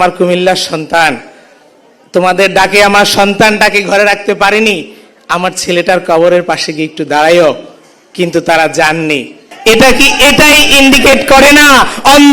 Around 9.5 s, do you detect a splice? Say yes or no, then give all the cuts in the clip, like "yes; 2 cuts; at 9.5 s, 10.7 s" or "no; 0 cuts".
yes; 1 cut; at 9.5 s